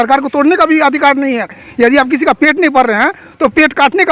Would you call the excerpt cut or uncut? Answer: uncut